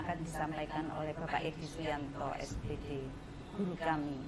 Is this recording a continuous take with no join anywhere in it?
yes; 0 cuts

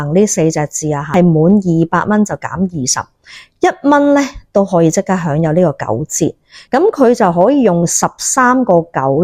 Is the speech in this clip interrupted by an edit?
yes; 2 cuts; at 1.1 s, 6.5 s

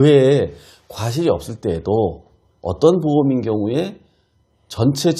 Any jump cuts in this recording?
no; 0 cuts

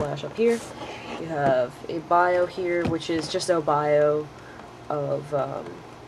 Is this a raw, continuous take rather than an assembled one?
no; 1 cut; at 1.2 s

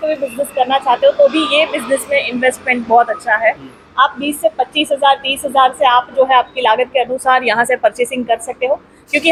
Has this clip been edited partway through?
no; 0 cuts

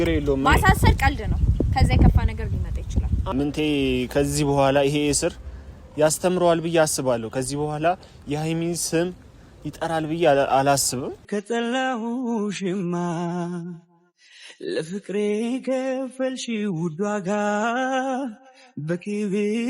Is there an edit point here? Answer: yes; 2 cuts; at 3.2 s, 11.2 s

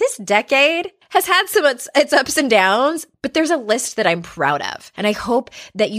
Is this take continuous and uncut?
no; 2 cuts; at 0.9 s, 4.8 s

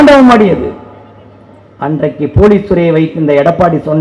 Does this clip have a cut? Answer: no; 0 cuts

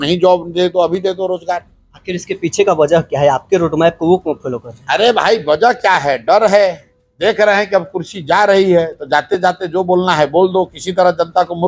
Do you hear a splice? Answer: no; 0 cuts

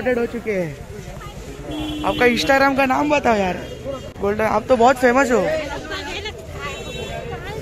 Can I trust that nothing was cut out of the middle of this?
yes; 0 cuts

